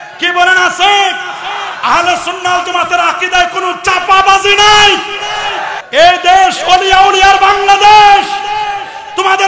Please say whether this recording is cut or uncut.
cut